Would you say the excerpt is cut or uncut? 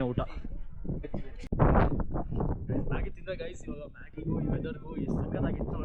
uncut